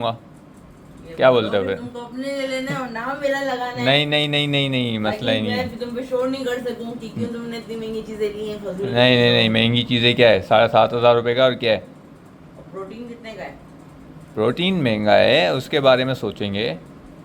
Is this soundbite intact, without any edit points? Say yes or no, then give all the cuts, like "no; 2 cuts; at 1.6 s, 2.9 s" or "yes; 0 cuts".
yes; 0 cuts